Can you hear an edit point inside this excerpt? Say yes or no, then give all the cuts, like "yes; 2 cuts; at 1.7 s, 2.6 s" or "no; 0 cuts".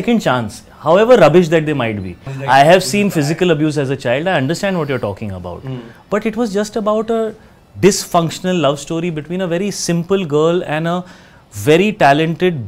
yes; 1 cut; at 2.3 s